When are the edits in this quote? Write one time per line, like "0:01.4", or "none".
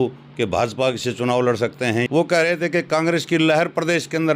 0:02.1

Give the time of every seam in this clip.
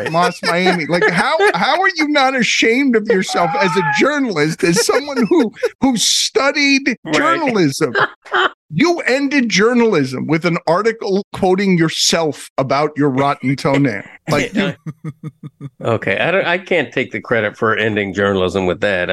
0:07.0
0:08.6

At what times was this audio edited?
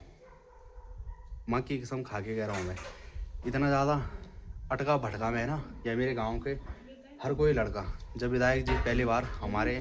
none

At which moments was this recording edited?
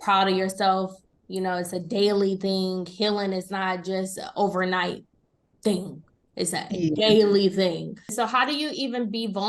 0:08.1

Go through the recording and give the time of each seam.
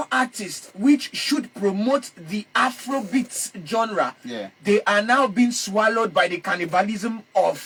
none

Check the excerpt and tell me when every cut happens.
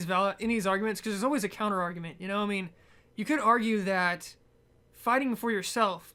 none

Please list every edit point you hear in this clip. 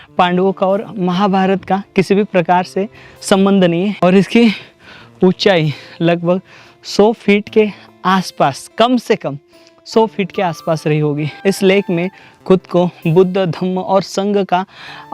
0:04.0
0:11.3

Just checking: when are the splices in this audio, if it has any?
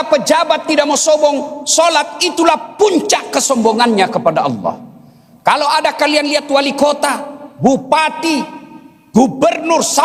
none

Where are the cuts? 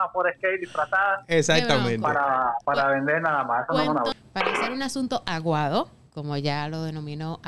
0:02.6
0:04.1

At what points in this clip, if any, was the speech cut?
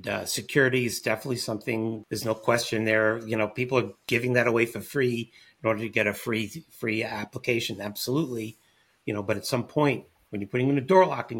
0:02.0

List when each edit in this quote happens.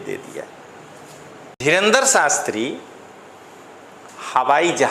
0:01.5

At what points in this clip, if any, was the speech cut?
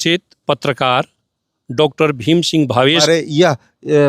0:03.0

